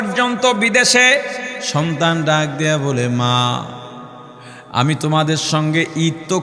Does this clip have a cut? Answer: yes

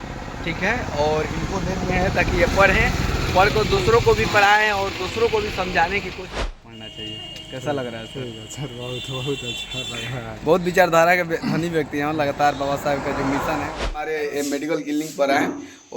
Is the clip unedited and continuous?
no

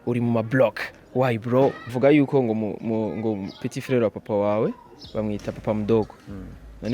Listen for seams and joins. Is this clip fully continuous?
no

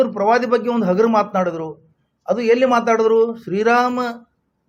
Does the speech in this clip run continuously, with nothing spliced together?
yes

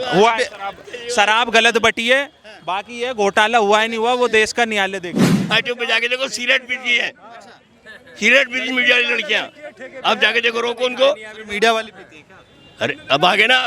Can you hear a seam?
yes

